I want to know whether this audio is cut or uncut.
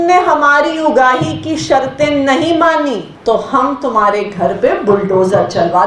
cut